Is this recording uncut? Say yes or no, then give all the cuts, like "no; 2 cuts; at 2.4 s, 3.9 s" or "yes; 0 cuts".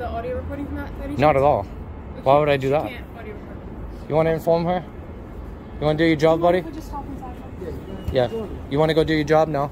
yes; 0 cuts